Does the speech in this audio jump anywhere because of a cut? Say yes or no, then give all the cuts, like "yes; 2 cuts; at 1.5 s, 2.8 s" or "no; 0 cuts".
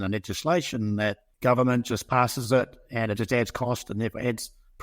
yes; 1 cut; at 1.3 s